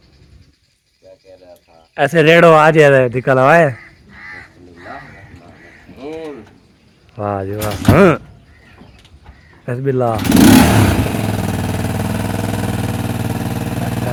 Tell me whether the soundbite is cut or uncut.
uncut